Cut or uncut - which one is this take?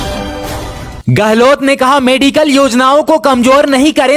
uncut